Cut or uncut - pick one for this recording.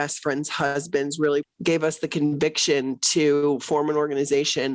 cut